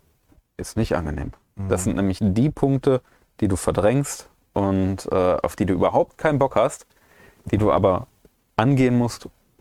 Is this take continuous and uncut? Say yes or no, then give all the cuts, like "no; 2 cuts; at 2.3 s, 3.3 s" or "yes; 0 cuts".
yes; 0 cuts